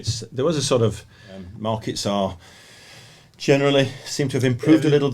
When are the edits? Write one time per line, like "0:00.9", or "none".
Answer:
0:01.5